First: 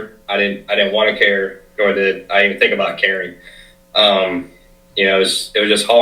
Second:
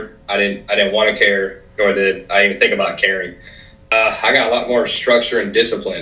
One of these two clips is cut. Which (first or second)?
second